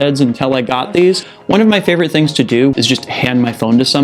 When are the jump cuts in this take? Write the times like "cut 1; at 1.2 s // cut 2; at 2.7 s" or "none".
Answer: cut 1; at 1.3 s // cut 2; at 2.7 s